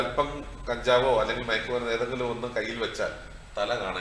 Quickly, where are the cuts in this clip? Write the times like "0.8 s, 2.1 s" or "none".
none